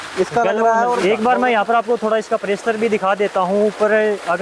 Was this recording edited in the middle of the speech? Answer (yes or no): yes